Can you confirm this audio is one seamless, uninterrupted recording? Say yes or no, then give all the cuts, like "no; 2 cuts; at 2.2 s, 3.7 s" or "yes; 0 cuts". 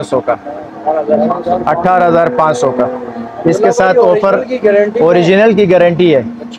yes; 0 cuts